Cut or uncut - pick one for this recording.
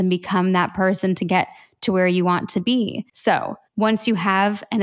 cut